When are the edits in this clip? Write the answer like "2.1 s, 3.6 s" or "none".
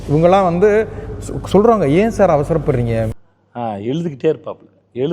3.1 s